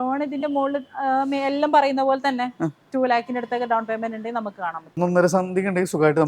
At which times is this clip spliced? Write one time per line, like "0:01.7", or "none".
0:05.0